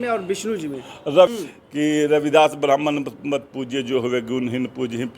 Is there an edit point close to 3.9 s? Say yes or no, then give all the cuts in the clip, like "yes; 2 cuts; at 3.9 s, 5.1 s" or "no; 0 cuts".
no; 1 cut; at 1.3 s